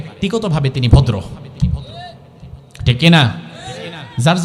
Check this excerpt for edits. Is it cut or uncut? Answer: uncut